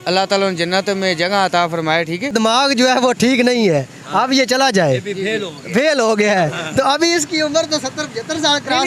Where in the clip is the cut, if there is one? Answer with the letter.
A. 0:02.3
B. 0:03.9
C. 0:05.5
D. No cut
A